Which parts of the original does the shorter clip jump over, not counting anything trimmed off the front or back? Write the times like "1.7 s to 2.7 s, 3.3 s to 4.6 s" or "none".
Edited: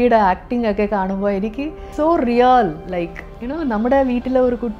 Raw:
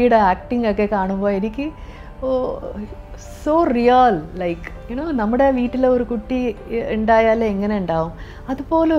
1.8 s to 3.3 s